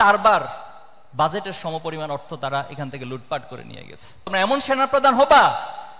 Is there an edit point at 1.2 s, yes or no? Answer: no